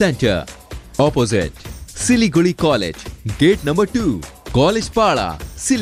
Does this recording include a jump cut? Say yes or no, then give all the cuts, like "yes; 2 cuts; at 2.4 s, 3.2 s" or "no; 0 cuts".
no; 0 cuts